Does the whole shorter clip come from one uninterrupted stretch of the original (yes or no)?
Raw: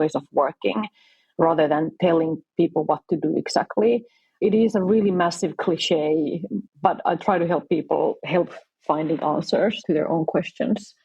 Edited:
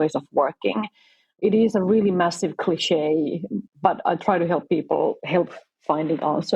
no